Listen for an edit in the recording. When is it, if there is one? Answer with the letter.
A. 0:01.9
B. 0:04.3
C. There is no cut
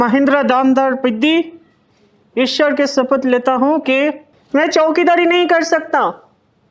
B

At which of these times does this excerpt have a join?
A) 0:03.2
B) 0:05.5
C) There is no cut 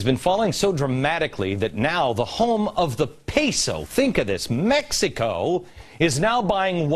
B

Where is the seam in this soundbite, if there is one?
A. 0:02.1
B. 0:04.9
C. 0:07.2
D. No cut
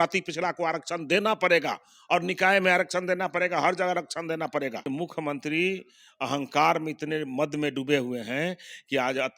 B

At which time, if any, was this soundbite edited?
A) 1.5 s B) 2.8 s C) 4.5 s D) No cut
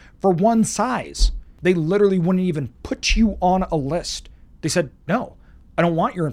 A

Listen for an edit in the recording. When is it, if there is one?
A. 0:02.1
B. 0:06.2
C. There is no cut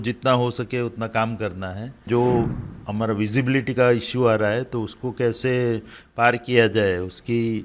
A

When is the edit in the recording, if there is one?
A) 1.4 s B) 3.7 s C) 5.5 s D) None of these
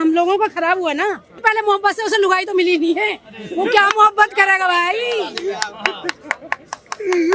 A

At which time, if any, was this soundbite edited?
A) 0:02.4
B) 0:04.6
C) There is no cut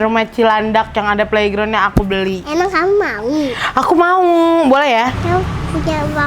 A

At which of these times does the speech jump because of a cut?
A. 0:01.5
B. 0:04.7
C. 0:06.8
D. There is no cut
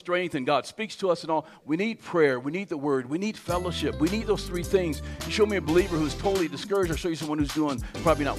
A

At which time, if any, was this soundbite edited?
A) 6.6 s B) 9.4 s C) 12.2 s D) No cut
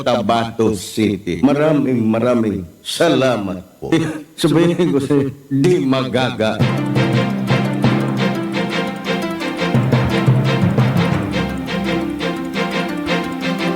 A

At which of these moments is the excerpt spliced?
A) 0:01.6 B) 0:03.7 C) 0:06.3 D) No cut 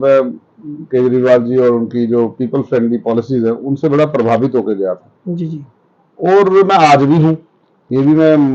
D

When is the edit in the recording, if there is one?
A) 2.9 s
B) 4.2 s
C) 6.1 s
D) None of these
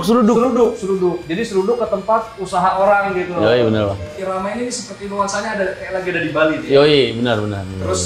B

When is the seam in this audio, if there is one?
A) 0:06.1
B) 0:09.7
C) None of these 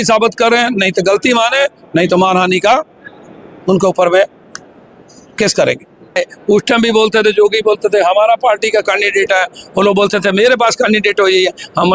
A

